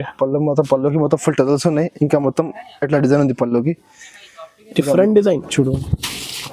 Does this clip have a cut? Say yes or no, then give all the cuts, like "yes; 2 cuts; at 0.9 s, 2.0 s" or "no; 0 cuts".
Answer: no; 0 cuts